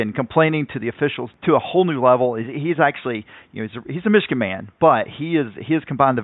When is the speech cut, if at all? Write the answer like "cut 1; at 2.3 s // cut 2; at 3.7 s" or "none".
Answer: cut 1; at 1.3 s

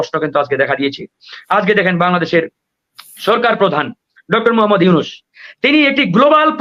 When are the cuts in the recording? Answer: none

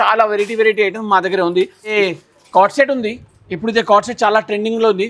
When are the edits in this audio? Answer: cut 1; at 1.8 s

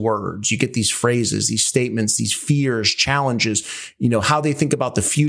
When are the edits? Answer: none

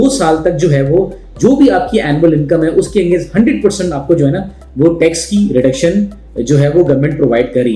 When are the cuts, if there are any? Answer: none

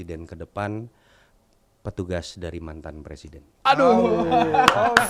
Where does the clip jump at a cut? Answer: none

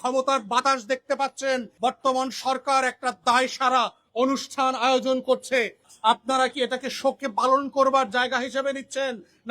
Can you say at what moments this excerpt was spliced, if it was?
cut 1; at 1.7 s // cut 2; at 5.8 s

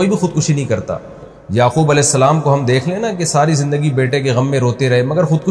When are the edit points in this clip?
cut 1; at 1.4 s

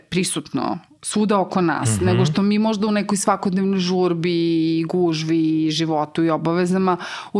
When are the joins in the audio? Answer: none

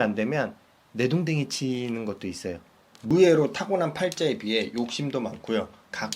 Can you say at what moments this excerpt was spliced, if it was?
cut 1; at 3.1 s

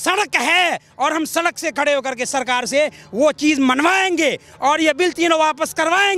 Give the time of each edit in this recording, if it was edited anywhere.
none

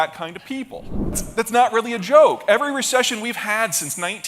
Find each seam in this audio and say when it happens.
cut 1; at 1.2 s

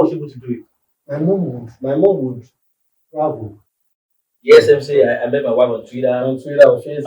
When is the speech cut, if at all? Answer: cut 1; at 3.8 s

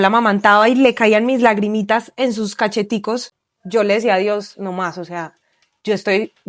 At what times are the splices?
none

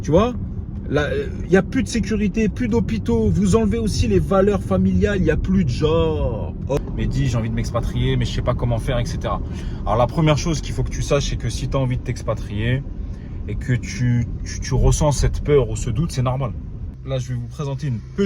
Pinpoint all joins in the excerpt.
cut 1; at 6.8 s // cut 2; at 17.0 s

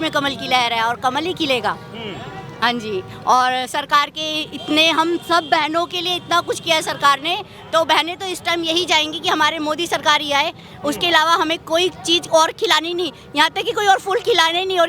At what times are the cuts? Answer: none

